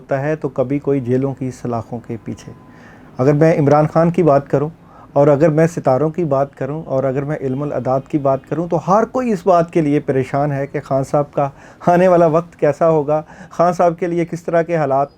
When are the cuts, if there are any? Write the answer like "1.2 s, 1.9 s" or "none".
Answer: none